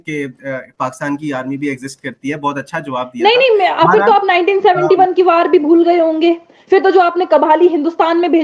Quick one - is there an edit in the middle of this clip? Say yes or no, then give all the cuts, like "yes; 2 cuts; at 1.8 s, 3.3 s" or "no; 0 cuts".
no; 0 cuts